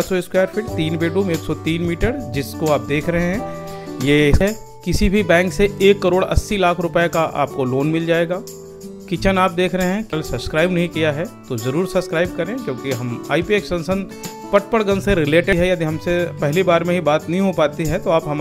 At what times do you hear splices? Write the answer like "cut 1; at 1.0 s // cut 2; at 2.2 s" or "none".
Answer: cut 1; at 4.4 s // cut 2; at 10.1 s // cut 3; at 15.5 s